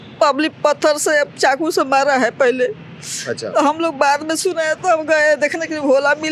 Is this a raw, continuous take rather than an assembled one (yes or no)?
yes